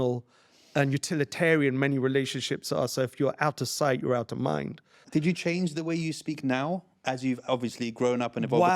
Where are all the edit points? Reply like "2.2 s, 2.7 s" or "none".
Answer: 5.0 s